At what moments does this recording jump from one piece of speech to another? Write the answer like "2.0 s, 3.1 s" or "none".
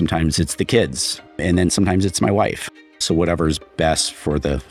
1.4 s, 3.0 s